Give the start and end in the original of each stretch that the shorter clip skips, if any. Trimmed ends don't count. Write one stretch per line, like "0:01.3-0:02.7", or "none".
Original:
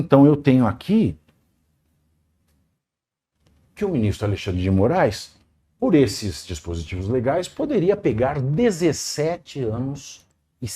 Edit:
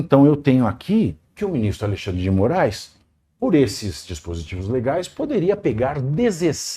0:01.2-0:03.6